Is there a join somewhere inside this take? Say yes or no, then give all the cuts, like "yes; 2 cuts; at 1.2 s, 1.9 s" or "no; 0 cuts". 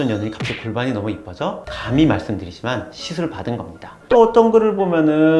yes; 1 cut; at 4.1 s